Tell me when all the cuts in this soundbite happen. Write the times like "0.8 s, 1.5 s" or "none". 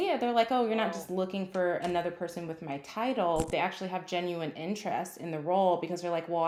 none